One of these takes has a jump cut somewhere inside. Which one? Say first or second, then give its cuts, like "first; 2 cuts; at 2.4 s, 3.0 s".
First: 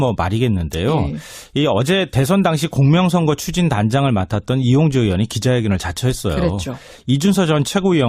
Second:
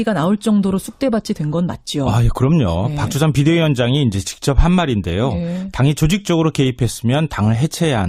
first; 1 cut; at 1.2 s